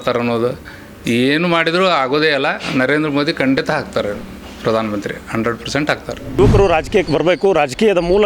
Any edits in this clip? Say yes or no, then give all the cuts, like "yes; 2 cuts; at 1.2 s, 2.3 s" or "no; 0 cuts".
yes; 1 cut; at 6.4 s